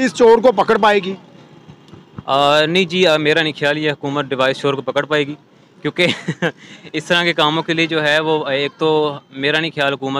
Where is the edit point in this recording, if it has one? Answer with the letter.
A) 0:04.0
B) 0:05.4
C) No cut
C